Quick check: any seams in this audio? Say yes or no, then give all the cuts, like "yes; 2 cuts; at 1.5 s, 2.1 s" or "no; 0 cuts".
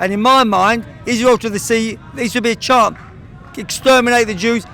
no; 0 cuts